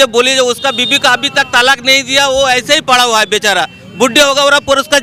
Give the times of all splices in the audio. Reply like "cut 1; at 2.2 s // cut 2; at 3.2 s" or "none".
none